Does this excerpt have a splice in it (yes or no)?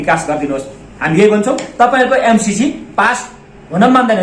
no